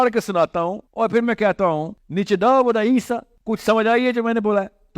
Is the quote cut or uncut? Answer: cut